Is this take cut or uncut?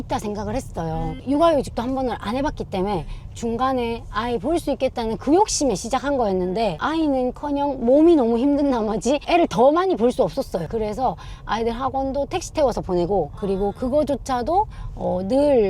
uncut